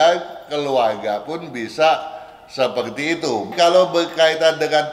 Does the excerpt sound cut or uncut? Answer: cut